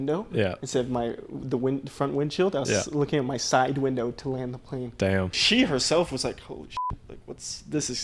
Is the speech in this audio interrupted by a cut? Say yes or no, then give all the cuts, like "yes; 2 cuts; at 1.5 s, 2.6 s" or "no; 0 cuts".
yes; 1 cut; at 5.4 s